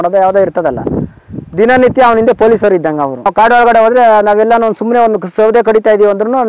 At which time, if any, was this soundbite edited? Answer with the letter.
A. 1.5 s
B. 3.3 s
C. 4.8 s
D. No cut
B